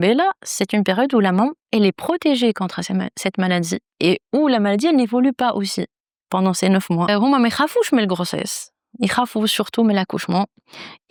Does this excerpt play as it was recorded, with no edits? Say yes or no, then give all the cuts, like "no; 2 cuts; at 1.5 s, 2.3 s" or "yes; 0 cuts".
yes; 0 cuts